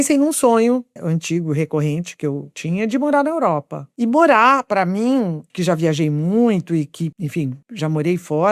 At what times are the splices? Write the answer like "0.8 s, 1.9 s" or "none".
0.9 s, 2.5 s, 3.8 s, 5.5 s